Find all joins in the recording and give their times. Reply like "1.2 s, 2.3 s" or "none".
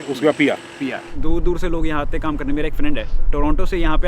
1.1 s

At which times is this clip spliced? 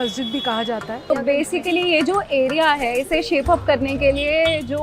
1.3 s

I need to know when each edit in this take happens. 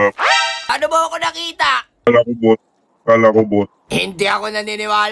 0.7 s, 2.1 s

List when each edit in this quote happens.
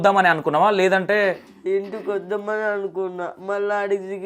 none

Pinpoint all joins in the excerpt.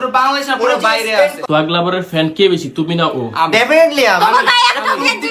1.4 s

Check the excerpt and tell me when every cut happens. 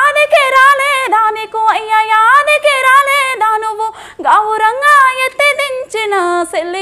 none

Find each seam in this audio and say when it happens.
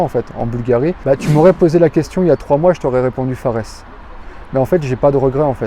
1.0 s

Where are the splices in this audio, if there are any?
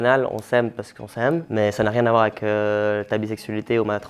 1.5 s

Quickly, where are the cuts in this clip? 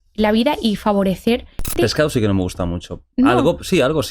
1.6 s

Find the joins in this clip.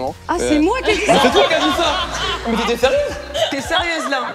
none

